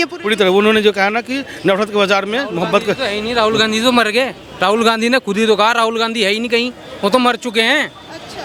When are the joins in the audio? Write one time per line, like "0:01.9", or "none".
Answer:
none